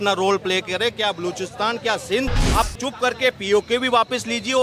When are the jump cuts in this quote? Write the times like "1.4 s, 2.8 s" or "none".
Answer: 2.4 s